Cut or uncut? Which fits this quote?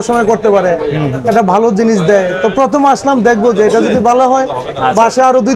uncut